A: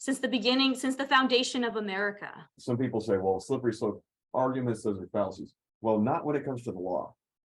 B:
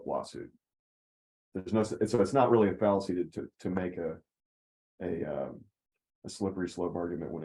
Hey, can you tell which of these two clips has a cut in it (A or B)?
A